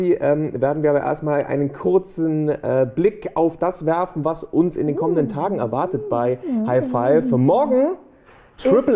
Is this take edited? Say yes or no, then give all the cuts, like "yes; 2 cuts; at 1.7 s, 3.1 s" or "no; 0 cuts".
no; 0 cuts